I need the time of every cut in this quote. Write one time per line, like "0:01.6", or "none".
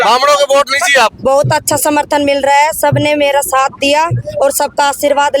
0:01.2